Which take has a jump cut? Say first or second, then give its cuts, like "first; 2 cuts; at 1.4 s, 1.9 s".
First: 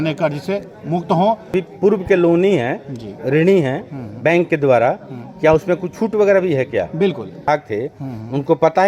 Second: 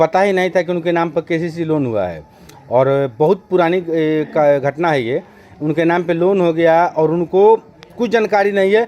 first; 2 cuts; at 1.5 s, 7.5 s